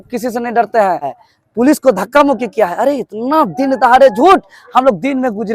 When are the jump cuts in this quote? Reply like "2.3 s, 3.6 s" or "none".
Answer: none